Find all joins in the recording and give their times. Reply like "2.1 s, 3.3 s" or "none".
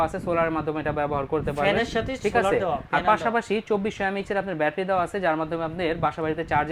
none

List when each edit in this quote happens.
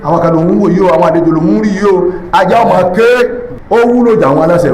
3.5 s

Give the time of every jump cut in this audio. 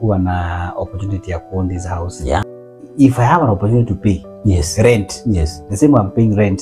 2.5 s

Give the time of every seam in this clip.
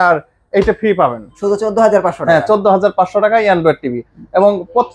1.3 s

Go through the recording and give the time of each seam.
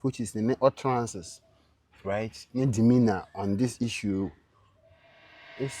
none

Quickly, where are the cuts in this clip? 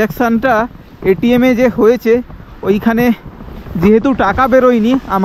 none

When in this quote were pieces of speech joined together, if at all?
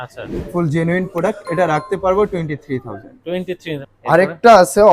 3.9 s

